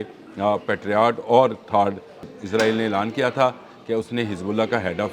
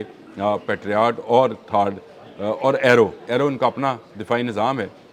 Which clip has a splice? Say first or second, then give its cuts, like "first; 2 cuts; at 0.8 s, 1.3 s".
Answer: first; 1 cut; at 2.3 s